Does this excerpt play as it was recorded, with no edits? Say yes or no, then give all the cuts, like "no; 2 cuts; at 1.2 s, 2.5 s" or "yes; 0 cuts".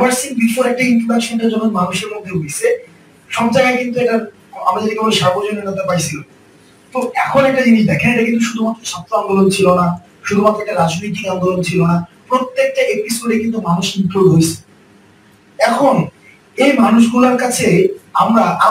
yes; 0 cuts